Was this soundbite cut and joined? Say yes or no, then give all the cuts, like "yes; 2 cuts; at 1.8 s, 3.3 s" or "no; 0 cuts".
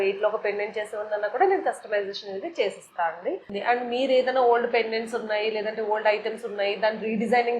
yes; 1 cut; at 3.5 s